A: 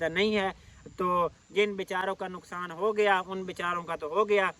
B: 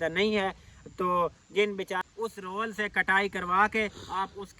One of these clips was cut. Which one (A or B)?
B